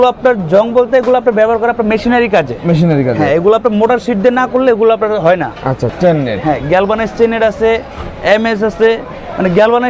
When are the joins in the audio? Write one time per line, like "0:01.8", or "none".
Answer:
0:05.9